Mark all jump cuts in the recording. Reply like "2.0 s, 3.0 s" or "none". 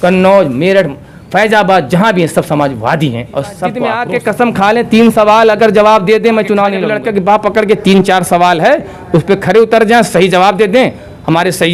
3.9 s, 6.9 s

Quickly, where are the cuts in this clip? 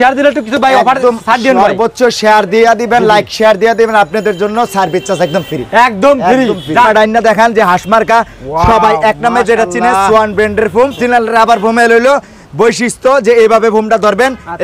6.9 s, 11.0 s

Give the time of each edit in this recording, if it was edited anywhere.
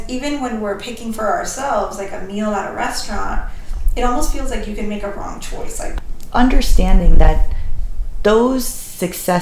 5.9 s

